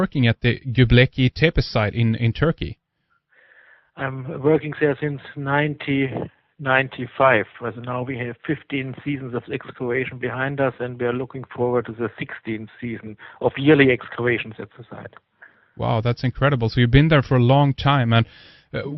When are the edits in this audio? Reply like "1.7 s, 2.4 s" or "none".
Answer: none